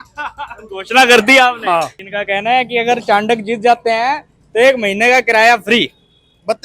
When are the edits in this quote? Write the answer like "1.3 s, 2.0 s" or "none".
2.0 s

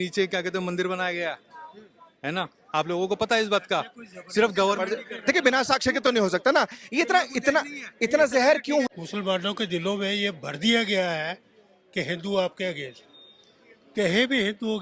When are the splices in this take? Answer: 8.9 s

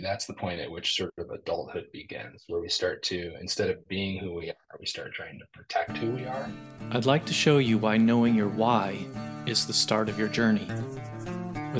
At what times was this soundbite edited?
6.6 s

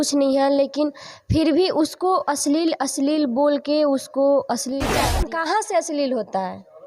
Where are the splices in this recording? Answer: 5.2 s

